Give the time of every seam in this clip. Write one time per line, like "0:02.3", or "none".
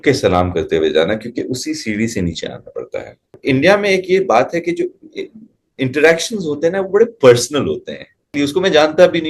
0:03.4
0:08.3

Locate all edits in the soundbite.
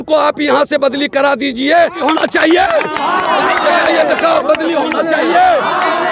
0:02.0

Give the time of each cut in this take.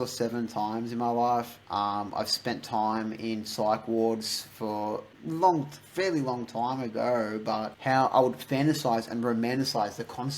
0:01.6
0:05.1
0:07.7

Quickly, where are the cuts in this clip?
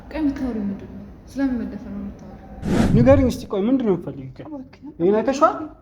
0:02.7

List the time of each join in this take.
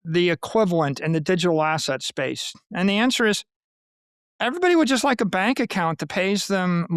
none

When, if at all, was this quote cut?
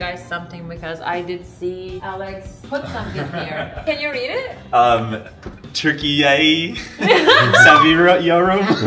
0:02.2
0:03.8

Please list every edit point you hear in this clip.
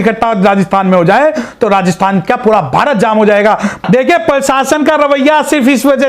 0:03.8

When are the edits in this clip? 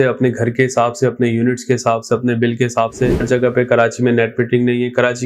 0:03.2

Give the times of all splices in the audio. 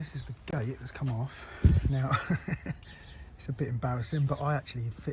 none

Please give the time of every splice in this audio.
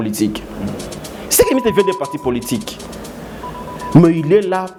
none

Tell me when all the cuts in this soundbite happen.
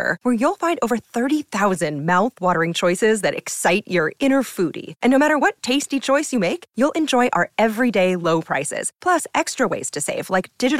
none

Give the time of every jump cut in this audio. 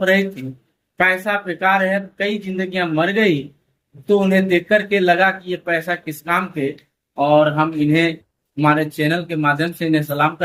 none

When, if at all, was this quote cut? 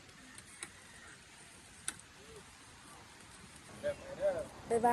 0:03.7

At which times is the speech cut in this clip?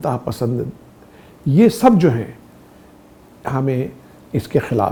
none

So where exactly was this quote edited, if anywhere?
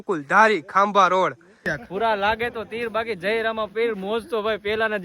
0:01.7

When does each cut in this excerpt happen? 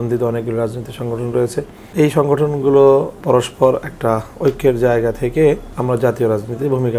0:01.8
0:03.2
0:05.7

